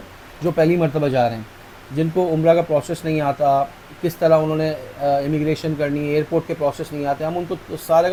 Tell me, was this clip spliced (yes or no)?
no